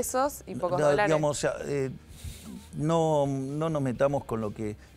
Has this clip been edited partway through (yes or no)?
no